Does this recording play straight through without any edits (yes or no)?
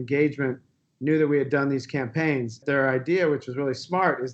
no